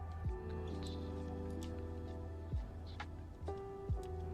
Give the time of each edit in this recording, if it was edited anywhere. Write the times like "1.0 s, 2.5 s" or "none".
none

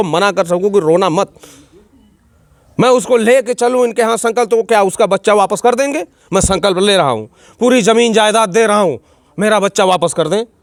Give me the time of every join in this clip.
none

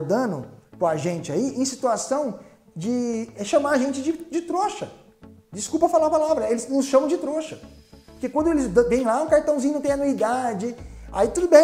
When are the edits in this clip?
none

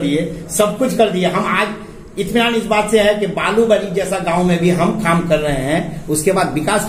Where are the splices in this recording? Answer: none

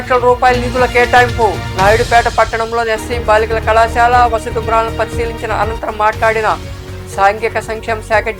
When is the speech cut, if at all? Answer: none

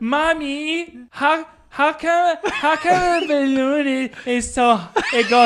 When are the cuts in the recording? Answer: 1.0 s

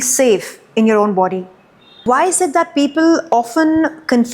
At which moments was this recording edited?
2.0 s

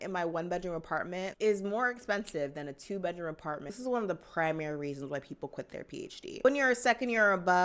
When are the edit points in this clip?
3.8 s, 6.4 s

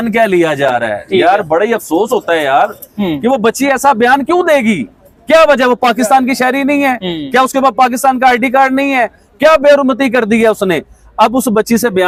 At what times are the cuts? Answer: none

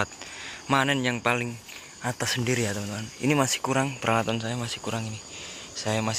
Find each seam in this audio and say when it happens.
none

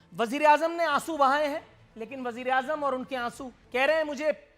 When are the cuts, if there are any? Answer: 3.5 s

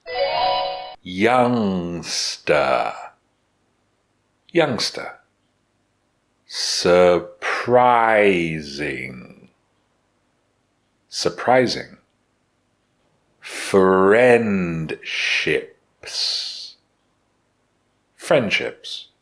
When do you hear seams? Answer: 0.9 s

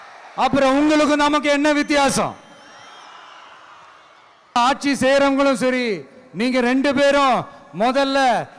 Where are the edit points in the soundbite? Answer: 4.6 s

